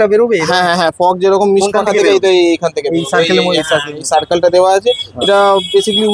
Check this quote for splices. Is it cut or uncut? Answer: uncut